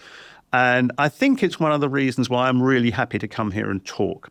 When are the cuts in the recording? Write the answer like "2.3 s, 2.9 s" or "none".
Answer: none